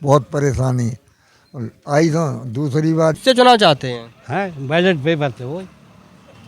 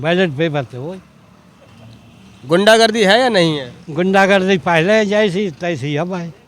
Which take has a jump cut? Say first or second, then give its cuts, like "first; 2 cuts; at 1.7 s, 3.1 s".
first; 1 cut; at 3.2 s